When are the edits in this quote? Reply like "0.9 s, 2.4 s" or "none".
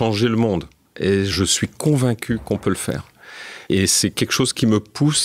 1.3 s, 3.8 s